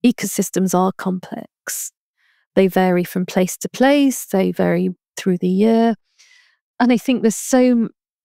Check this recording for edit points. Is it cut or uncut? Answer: uncut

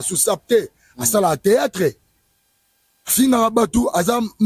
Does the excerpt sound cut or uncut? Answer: uncut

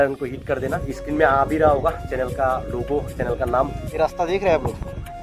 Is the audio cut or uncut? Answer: cut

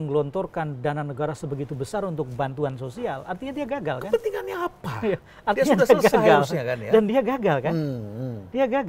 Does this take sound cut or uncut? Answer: uncut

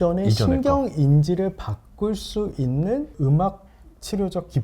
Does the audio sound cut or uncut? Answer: cut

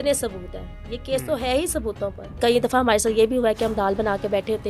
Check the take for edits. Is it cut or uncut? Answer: cut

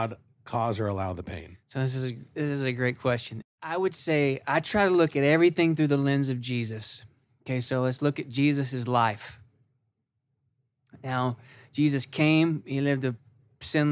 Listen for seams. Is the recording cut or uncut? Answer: cut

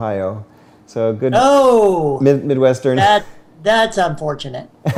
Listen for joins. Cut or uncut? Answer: uncut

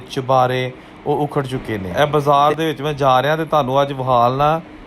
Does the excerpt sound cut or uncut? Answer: cut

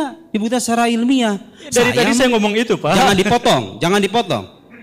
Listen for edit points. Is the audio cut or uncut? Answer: uncut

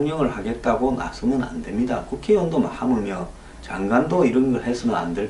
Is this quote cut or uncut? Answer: uncut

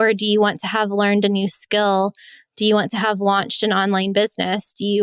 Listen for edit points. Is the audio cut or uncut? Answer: uncut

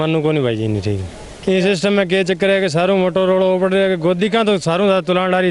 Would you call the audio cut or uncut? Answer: uncut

